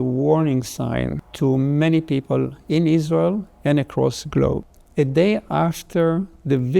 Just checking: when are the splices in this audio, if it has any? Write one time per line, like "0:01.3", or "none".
0:01.2
0:04.8